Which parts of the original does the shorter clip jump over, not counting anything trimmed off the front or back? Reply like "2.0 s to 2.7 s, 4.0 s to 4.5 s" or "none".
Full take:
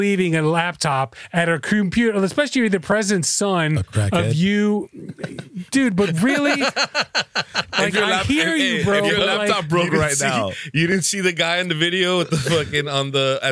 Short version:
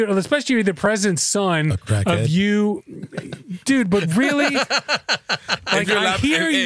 none